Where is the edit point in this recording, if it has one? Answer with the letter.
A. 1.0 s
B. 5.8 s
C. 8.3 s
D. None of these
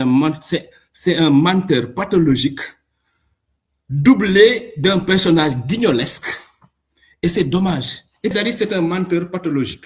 C